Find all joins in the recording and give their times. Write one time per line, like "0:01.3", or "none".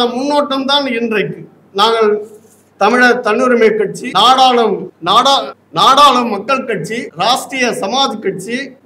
none

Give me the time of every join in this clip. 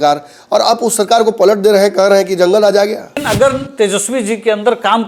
0:03.2

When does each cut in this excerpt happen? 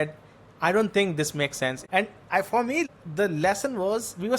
0:01.8
0:02.8

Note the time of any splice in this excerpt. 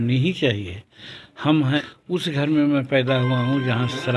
0:01.8

